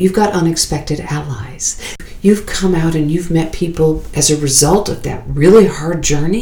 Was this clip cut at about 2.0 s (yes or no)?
yes